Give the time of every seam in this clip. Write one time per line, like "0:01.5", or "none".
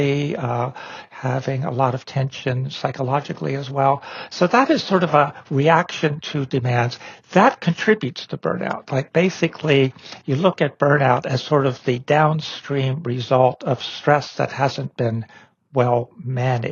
none